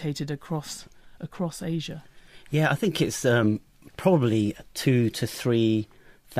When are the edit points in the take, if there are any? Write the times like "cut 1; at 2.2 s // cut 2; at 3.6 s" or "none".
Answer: cut 1; at 2.2 s